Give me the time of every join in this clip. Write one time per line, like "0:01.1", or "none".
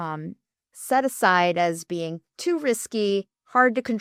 none